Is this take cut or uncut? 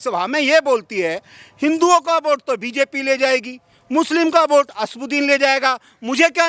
uncut